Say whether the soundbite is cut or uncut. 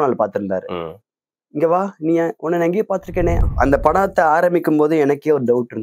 cut